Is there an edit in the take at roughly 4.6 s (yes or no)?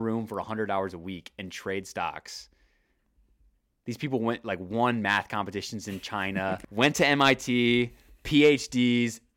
no